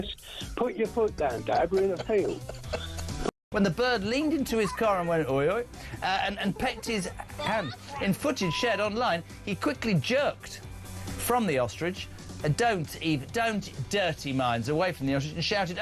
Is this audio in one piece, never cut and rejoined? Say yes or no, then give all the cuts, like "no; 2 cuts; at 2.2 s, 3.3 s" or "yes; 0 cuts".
no; 1 cut; at 3.2 s